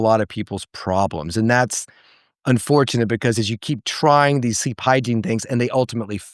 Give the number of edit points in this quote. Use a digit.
0